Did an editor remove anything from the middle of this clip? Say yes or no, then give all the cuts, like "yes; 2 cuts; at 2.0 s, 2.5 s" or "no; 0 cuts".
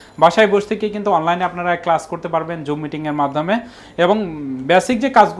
no; 0 cuts